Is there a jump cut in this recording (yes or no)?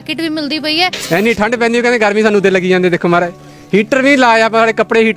yes